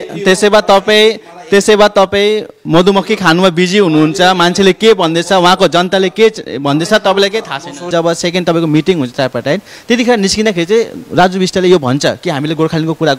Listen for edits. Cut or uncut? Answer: cut